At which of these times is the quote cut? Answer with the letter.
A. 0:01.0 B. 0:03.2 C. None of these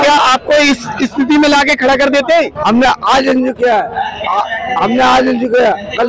C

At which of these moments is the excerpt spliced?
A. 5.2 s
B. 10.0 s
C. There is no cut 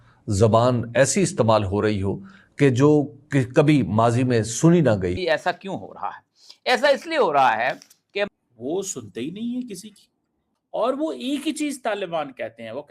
A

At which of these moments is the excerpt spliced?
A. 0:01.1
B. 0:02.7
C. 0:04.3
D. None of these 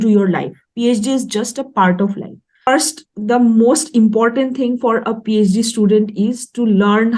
B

